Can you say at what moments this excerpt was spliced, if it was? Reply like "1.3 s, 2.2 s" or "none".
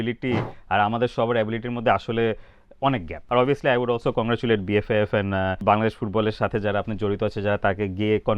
3.1 s, 5.6 s